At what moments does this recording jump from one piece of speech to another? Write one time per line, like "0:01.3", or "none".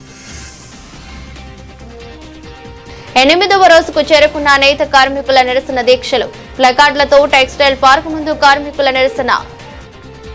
none